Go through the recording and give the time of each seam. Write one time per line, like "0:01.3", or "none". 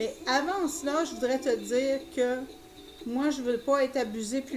none

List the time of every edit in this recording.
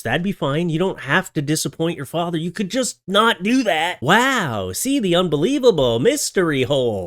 none

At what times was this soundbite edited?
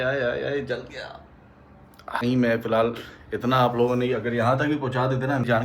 0:02.2

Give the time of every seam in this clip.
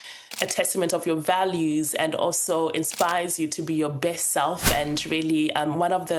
none

